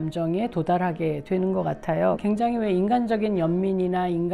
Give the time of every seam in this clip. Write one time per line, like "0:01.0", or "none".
0:02.2